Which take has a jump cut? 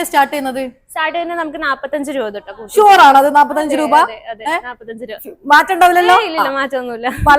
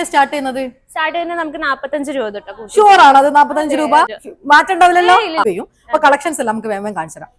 second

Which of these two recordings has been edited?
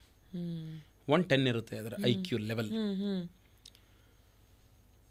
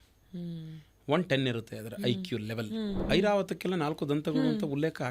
second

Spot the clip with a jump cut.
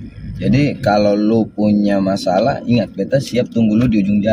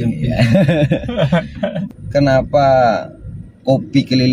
second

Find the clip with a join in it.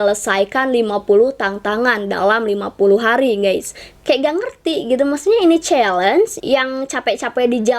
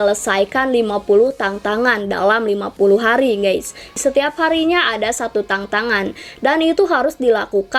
first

